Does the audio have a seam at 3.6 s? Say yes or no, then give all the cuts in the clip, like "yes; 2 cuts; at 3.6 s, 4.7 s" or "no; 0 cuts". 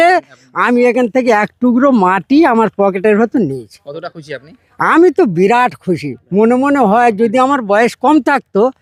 no; 0 cuts